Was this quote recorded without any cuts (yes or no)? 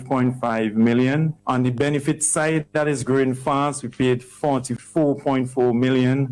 no